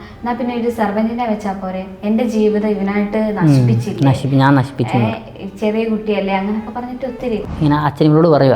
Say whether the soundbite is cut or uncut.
cut